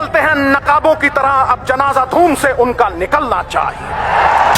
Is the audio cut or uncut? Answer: uncut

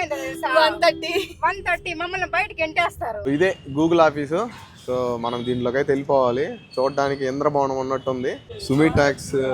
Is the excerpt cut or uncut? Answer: cut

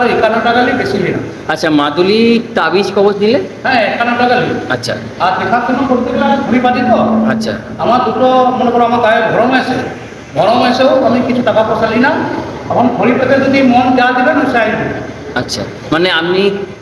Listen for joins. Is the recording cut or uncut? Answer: uncut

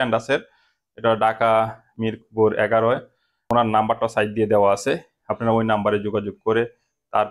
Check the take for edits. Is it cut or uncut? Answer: cut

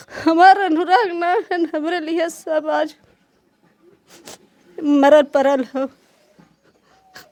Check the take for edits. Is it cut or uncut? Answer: uncut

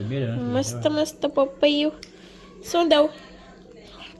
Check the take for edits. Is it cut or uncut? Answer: uncut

